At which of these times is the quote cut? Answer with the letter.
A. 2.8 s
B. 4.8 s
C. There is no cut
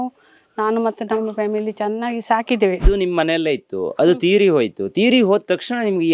A